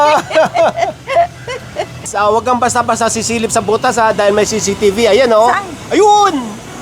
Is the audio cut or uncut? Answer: cut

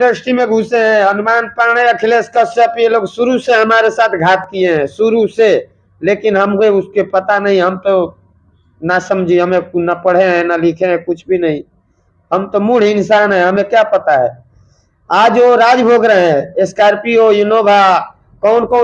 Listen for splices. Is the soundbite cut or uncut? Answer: uncut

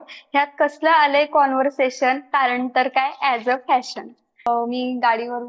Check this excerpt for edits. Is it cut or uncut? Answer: cut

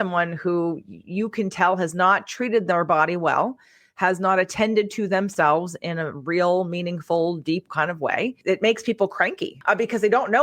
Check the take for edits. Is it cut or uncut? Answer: cut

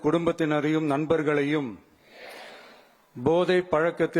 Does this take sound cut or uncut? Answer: cut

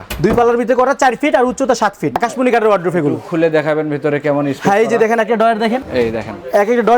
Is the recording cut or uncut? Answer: cut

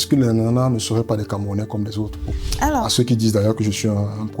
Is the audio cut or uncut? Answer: cut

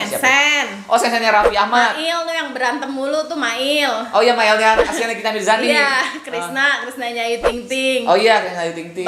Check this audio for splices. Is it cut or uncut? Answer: uncut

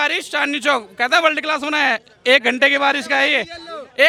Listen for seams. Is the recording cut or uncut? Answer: uncut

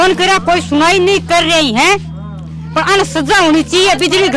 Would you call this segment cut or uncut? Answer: uncut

